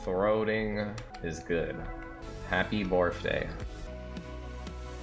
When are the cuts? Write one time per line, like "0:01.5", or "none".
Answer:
0:01.1
0:02.2
0:03.9